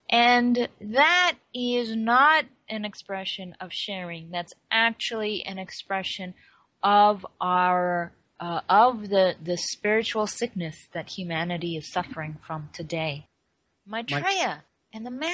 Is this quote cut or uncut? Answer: cut